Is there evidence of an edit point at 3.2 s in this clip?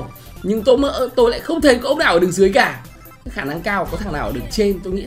no; 0 cuts

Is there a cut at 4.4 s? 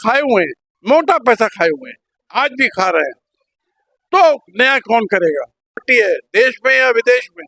no; 1 cut; at 5.9 s

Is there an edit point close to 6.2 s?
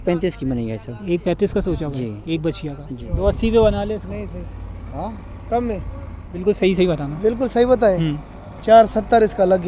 yes; 2 cuts; at 3.1 s, 6.2 s

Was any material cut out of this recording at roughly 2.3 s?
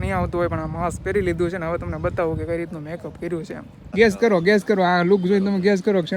no; 1 cut; at 3.8 s

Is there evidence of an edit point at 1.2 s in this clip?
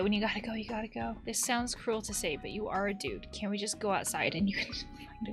yes; 1 cut; at 1.2 s

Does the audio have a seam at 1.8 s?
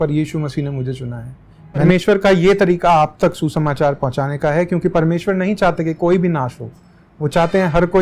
yes; 1 cut; at 1.8 s

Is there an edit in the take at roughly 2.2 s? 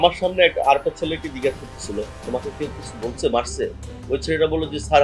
yes; 1 cut; at 2.2 s

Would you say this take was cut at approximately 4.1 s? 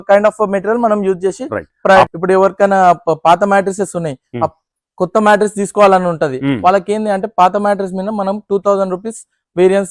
no; 1 cut; at 2.1 s

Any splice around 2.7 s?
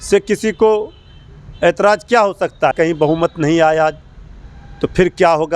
yes; 1 cut; at 2.7 s

